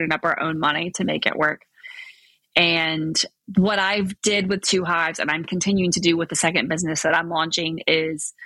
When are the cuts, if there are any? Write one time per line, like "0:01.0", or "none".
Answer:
none

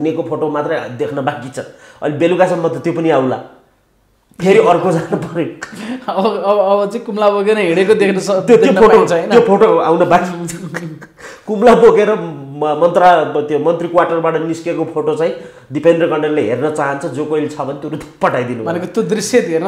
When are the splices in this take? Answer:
none

